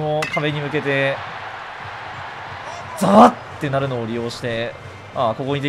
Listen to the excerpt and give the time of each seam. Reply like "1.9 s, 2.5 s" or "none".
none